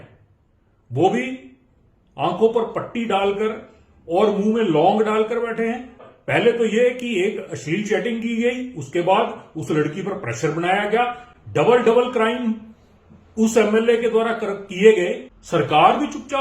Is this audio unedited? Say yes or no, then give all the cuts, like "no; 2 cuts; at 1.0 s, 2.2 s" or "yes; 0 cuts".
no; 2 cuts; at 6.1 s, 15.3 s